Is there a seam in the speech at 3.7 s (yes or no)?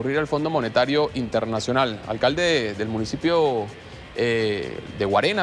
no